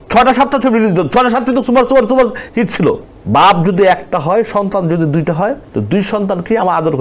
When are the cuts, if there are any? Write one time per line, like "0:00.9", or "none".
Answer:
0:03.1
0:05.7